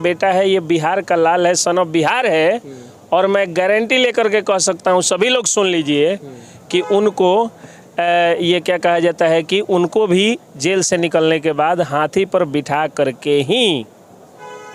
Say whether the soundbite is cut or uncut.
uncut